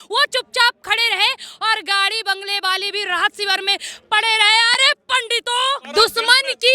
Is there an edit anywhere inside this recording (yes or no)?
yes